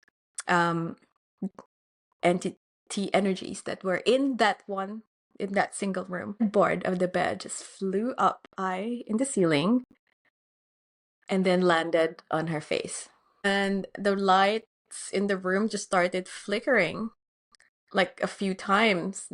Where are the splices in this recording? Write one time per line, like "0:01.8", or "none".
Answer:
0:06.4
0:13.4